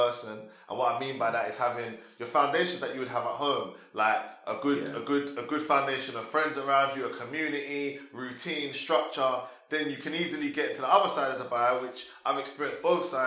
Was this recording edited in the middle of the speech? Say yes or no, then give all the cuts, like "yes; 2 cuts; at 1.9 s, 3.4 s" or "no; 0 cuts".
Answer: no; 0 cuts